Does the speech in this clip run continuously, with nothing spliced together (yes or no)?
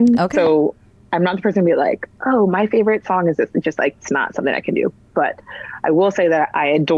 yes